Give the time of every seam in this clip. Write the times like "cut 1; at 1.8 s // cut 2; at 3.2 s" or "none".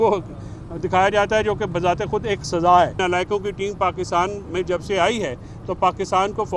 cut 1; at 3.0 s